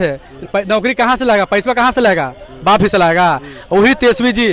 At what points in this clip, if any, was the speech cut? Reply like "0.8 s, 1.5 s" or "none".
none